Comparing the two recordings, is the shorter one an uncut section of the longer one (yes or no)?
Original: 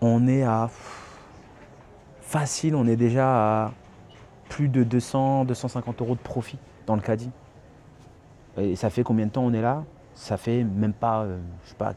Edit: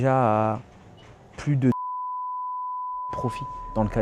yes